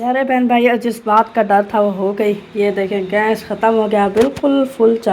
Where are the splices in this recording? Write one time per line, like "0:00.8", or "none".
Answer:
none